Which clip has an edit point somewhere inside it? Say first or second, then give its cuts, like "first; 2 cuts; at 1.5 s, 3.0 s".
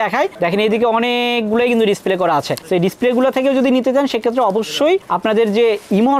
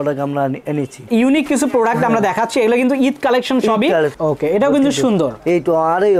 second; 2 cuts; at 1.0 s, 4.1 s